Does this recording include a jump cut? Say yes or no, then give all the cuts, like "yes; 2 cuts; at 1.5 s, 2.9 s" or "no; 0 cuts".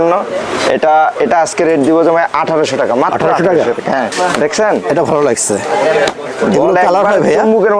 yes; 1 cut; at 4.1 s